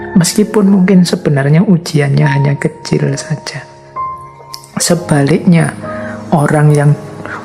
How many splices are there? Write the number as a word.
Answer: zero